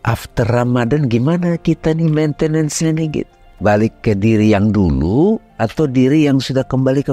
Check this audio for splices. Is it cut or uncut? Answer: cut